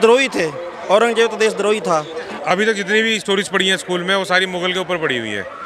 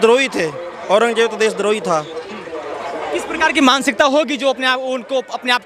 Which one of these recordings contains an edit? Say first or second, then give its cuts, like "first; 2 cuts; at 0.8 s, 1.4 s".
first; 1 cut; at 2.3 s